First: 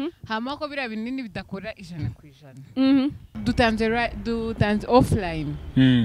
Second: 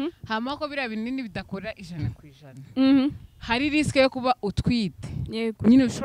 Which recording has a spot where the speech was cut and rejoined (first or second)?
first